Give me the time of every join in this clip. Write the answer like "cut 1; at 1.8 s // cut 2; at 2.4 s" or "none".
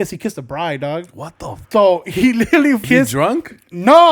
cut 1; at 1.6 s // cut 2; at 2.8 s